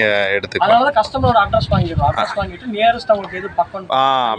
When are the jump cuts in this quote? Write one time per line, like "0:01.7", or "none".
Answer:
none